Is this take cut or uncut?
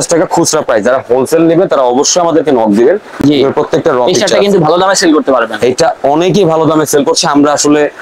uncut